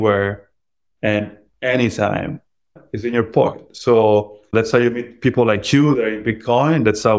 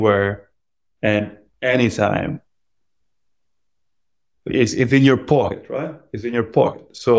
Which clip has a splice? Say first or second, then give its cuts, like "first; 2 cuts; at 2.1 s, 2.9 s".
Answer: first; 2 cuts; at 2.8 s, 4.5 s